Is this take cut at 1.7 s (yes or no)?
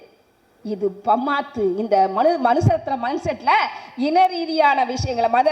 no